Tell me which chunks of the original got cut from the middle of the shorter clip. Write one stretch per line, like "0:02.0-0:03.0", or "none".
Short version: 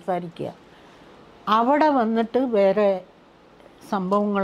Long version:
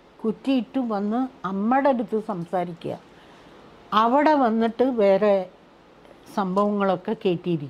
none